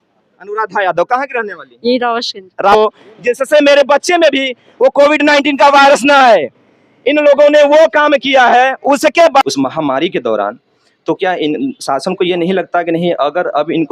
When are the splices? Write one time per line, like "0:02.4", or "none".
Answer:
0:02.7
0:09.4